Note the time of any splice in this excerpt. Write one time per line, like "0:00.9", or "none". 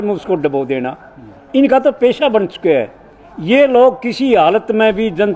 none